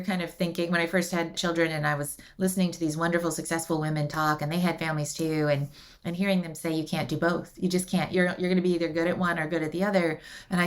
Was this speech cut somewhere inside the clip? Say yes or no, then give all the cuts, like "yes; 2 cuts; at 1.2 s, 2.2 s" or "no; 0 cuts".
yes; 2 cuts; at 1.4 s, 8.1 s